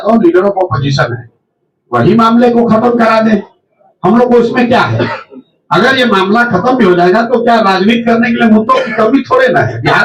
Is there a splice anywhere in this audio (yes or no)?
no